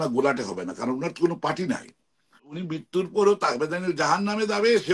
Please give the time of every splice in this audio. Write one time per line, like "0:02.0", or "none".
0:02.5